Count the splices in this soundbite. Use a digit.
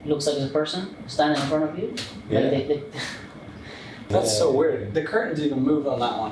1